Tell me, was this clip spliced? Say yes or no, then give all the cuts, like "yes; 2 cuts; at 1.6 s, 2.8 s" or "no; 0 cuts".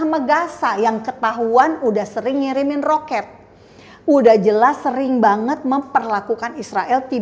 no; 0 cuts